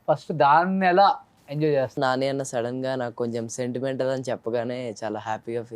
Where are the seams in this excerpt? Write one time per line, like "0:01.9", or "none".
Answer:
0:02.0

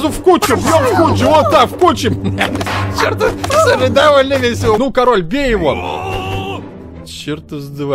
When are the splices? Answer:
0:04.8

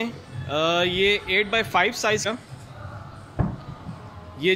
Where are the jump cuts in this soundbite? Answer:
0:02.3

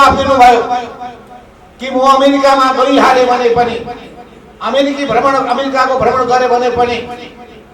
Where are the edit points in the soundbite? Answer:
none

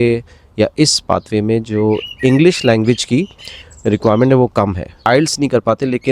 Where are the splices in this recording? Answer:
0:05.0

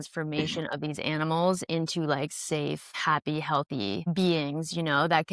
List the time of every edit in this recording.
none

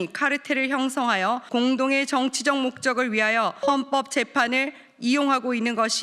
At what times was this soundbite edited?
0:01.4
0:03.6

